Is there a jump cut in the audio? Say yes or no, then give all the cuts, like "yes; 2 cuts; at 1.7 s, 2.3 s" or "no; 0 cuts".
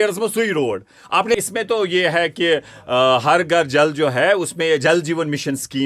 yes; 1 cut; at 1.3 s